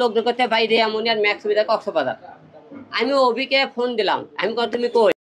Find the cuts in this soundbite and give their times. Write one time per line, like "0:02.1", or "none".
none